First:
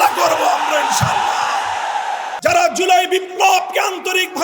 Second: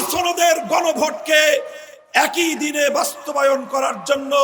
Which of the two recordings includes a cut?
first; 1 cut; at 2.3 s

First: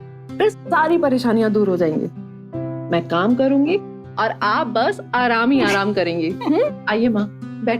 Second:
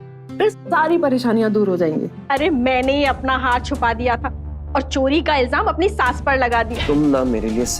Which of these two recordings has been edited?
second; 2 cuts; at 2.2 s, 6.8 s

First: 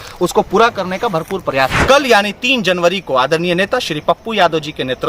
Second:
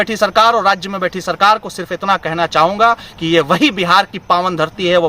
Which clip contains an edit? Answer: first; 1 cut; at 1.8 s

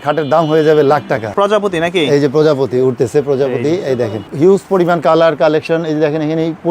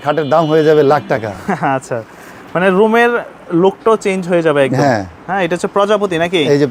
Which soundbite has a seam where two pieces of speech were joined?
first; 2 cuts; at 1.3 s, 4.3 s

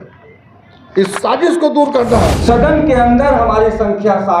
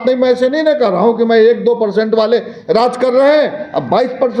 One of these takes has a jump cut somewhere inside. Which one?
first; 1 cut; at 2.4 s

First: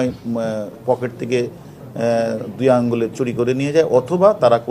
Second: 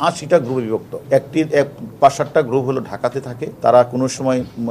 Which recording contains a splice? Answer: second; 2 cuts; at 0.9 s, 3.4 s

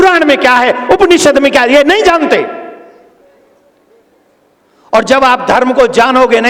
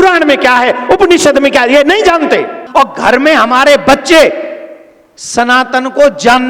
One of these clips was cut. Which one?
second; 1 cut; at 2.6 s

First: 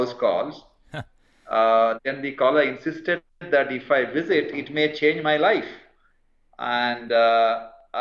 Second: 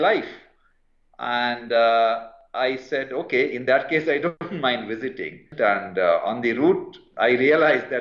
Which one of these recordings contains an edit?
second; 2 cuts; at 4.4 s, 5.4 s

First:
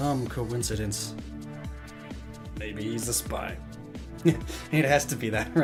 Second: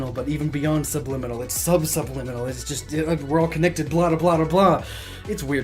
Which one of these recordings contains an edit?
second; 1 cut; at 1.3 s

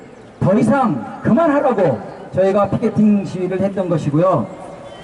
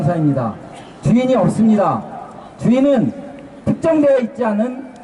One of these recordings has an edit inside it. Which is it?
first; 1 cut; at 2.1 s

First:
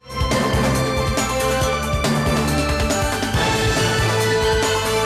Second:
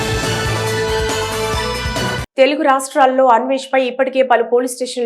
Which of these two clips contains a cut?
second; 1 cut; at 2.2 s

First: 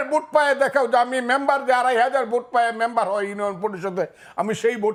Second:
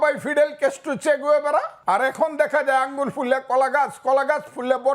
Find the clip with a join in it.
second; 1 cut; at 1.7 s

